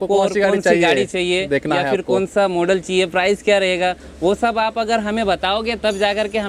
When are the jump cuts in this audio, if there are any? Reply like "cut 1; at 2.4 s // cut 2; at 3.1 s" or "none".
none